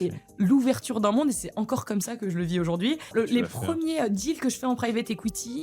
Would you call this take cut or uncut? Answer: cut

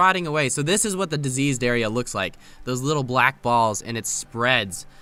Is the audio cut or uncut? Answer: uncut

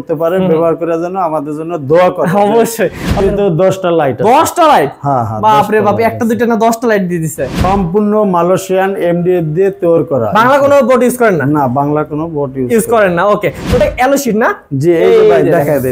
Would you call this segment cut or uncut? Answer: cut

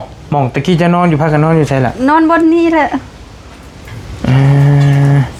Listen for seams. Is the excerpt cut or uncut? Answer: uncut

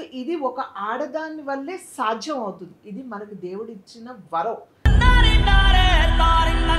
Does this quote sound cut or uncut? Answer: cut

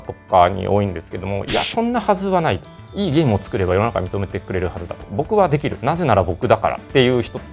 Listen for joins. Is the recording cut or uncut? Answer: uncut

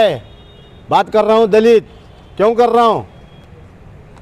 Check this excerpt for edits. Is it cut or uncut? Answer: uncut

